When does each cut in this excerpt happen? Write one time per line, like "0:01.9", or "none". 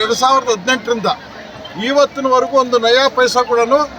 none